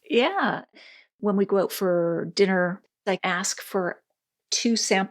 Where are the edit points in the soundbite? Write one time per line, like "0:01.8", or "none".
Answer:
0:01.0
0:02.9

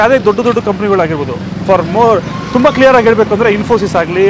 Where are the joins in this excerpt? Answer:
none

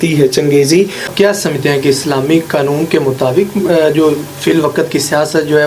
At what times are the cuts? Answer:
0:01.1

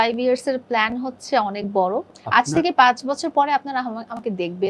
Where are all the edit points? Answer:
0:02.1

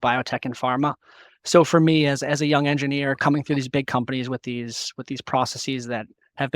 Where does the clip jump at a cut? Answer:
0:03.2

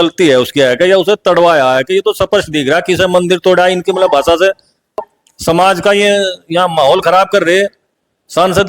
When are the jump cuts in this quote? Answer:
0:05.0

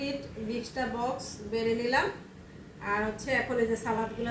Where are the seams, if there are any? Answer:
none

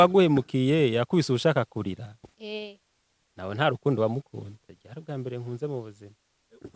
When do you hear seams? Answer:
0:04.6

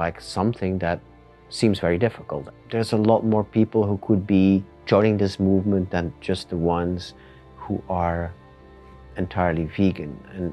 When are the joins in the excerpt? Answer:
0:02.4

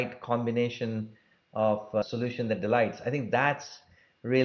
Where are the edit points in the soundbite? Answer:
0:02.0

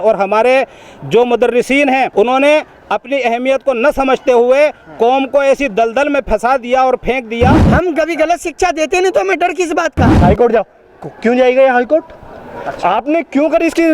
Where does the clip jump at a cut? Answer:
0:02.1
0:07.6
0:10.2

